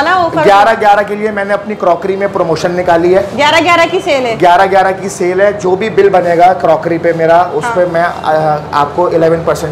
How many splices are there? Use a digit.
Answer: 0